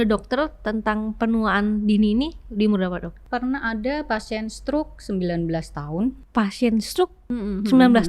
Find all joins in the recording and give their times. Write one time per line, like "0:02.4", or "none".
0:03.1
0:06.2